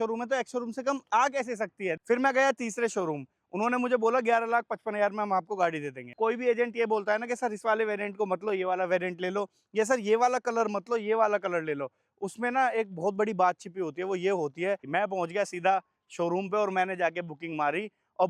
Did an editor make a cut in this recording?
yes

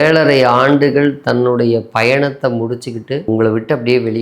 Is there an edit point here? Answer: yes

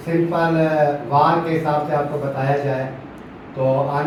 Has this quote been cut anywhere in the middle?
no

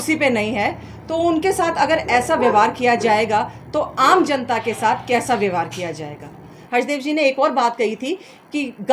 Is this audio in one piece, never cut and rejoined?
no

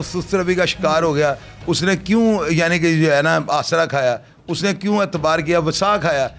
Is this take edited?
no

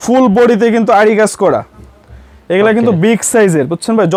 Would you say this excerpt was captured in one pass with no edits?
yes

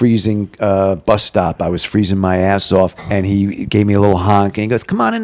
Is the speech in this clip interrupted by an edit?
yes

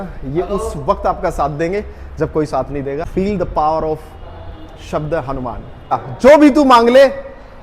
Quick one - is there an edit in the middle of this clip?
yes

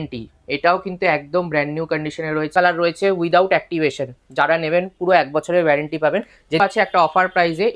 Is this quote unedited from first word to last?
no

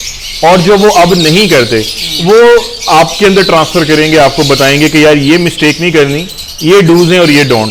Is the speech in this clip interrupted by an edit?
no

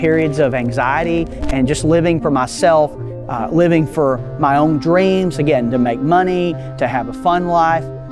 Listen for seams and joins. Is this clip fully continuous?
yes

